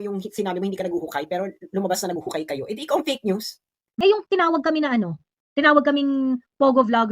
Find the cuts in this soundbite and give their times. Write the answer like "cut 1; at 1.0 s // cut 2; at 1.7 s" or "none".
cut 1; at 3.9 s